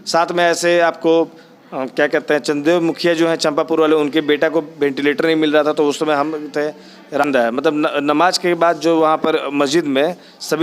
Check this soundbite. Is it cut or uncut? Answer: cut